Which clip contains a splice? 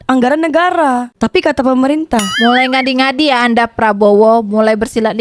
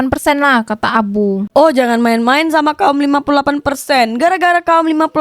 first; 1 cut; at 2.3 s

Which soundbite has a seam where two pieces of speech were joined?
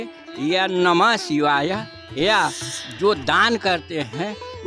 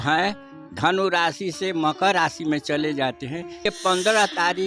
second; 1 cut; at 3.7 s

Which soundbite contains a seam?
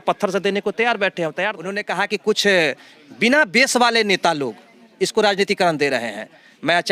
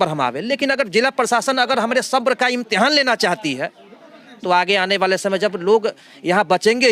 first; 1 cut; at 1.8 s

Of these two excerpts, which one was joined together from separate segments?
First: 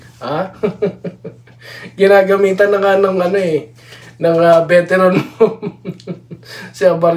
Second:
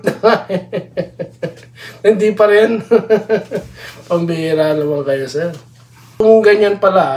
second; 1 cut; at 6.1 s

